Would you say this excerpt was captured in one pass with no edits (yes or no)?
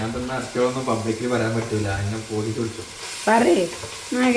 yes